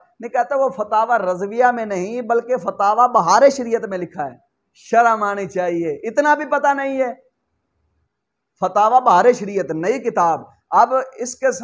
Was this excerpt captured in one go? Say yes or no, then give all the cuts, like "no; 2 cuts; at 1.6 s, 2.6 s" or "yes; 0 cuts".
no; 1 cut; at 7.6 s